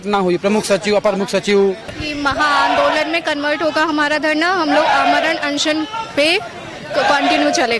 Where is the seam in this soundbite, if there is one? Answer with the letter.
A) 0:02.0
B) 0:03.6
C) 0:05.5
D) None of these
A